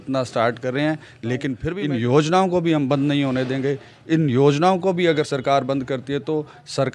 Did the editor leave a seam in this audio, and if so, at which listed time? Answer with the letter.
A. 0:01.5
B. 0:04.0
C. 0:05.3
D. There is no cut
A